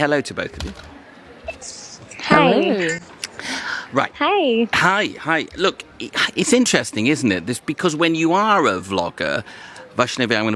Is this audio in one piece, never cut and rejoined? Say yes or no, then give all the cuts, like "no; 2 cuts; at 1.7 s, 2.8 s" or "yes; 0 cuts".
yes; 0 cuts